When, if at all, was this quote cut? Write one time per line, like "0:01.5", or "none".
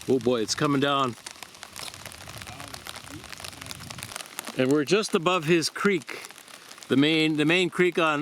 0:04.1